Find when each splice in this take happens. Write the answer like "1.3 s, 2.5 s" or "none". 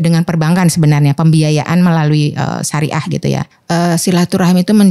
3.5 s